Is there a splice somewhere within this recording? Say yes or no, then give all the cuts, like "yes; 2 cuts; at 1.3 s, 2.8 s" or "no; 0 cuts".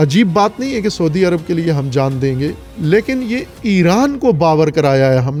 no; 0 cuts